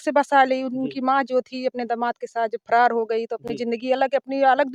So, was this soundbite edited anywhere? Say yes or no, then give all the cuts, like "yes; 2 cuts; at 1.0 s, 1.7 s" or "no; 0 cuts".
no; 0 cuts